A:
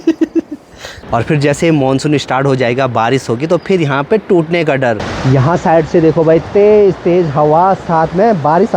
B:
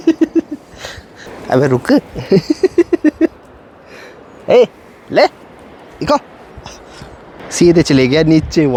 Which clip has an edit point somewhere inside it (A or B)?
A